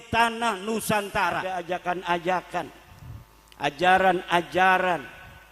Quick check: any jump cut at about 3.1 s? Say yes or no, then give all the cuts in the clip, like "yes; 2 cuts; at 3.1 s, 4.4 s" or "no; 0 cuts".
no; 1 cut; at 1.4 s